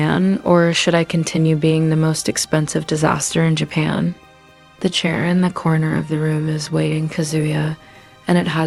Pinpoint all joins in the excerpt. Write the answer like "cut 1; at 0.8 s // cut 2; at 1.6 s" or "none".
none